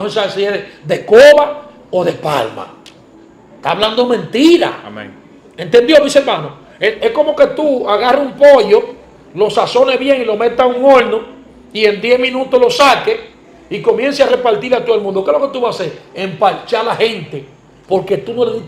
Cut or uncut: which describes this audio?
uncut